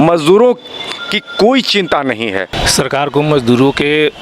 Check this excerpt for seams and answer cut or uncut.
cut